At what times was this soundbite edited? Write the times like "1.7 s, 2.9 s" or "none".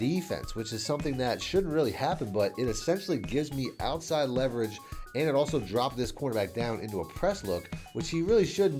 none